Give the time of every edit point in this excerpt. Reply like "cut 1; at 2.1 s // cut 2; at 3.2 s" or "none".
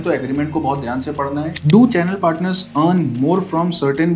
cut 1; at 1.5 s